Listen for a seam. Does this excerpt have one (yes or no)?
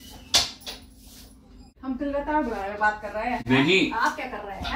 yes